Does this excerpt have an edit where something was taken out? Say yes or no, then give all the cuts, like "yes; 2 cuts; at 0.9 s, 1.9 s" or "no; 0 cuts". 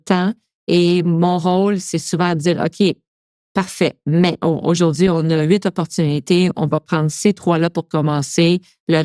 no; 0 cuts